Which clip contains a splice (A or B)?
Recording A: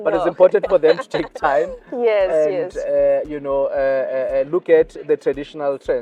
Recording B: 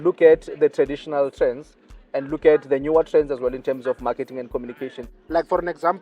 B